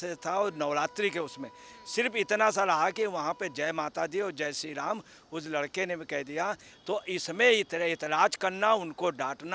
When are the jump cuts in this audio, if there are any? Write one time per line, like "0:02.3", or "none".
0:06.7